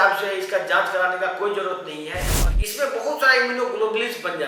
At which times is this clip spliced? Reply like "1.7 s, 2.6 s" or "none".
2.3 s